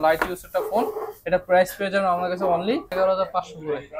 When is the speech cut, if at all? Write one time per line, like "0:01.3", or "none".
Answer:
0:02.9